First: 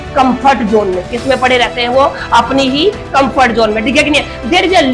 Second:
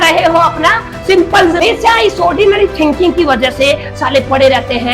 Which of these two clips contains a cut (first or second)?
second